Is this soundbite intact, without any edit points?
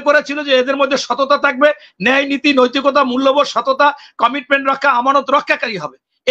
yes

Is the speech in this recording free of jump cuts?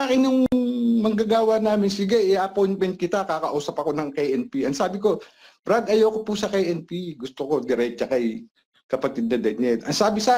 yes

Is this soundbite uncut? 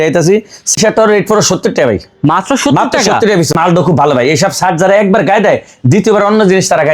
no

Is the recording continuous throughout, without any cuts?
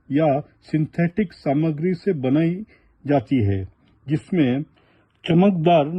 yes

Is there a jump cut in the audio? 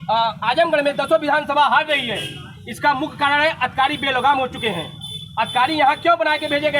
no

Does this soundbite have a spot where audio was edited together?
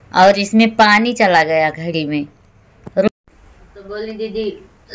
yes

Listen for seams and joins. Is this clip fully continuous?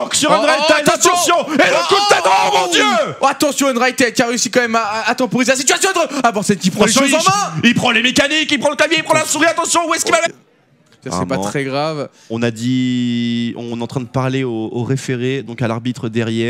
yes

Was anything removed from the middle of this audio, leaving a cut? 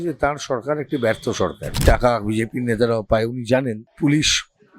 yes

